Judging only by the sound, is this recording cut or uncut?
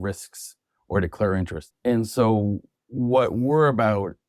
cut